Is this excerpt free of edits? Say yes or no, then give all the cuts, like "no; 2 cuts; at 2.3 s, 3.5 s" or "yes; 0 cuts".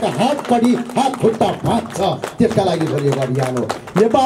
yes; 0 cuts